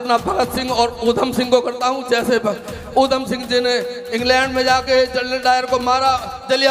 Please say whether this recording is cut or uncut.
uncut